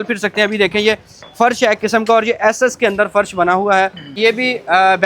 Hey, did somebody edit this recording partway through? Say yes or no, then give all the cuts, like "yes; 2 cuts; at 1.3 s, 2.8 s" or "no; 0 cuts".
yes; 1 cut; at 4.2 s